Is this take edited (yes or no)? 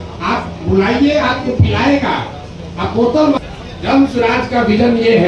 yes